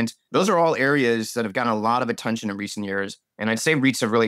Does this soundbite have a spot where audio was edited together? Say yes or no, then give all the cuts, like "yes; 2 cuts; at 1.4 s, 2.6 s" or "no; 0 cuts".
no; 0 cuts